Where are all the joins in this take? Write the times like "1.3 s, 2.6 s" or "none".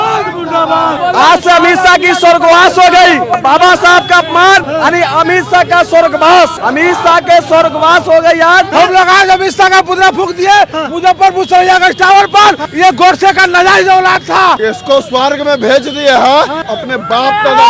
1.0 s, 3.3 s, 4.7 s, 6.6 s, 8.7 s, 12.7 s, 14.6 s, 16.7 s